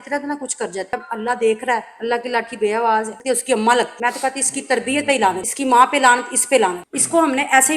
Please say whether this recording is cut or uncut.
cut